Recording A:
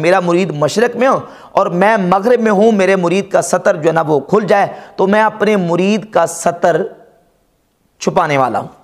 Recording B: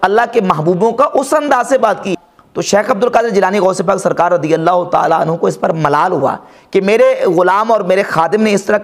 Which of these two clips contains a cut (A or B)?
B